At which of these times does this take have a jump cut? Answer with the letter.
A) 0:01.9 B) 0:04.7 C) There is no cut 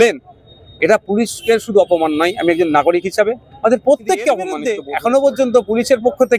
B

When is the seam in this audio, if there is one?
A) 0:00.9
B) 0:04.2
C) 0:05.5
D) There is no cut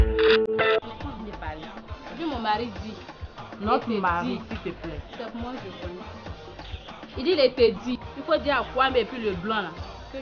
A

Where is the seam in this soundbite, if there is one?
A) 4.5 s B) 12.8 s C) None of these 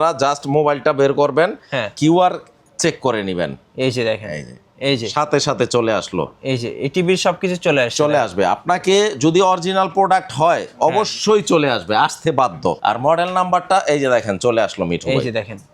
B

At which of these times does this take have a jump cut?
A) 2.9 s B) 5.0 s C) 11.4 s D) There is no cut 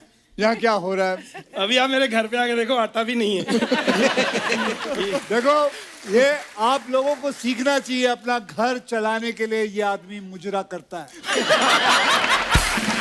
B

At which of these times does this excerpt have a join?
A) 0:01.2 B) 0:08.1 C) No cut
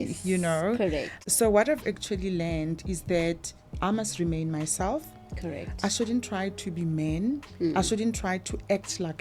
A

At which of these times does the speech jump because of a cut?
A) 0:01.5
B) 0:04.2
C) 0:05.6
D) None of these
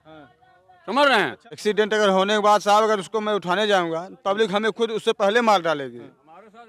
A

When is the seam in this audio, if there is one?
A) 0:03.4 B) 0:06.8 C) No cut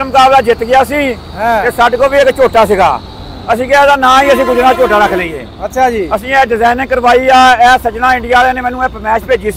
C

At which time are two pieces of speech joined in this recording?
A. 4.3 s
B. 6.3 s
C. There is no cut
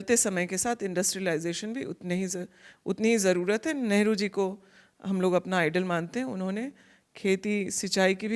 C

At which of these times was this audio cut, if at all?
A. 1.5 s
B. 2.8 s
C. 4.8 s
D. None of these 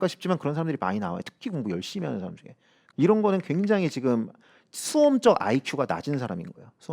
B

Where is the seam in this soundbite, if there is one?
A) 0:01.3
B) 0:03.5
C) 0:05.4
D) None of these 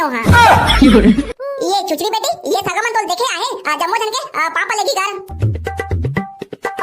A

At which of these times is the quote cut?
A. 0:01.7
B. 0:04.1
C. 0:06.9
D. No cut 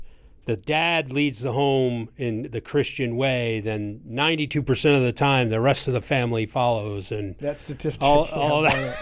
D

